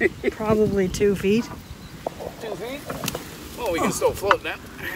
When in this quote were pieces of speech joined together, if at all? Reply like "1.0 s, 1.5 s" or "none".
none